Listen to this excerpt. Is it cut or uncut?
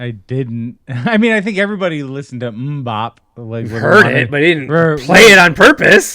cut